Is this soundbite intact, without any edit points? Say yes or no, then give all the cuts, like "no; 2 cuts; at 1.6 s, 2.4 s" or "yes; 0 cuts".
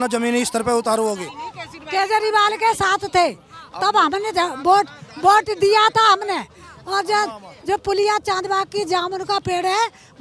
yes; 0 cuts